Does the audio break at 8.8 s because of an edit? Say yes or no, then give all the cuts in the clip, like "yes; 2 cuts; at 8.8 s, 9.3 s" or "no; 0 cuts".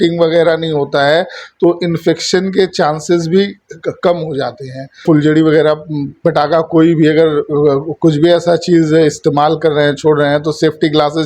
no; 1 cut; at 5.0 s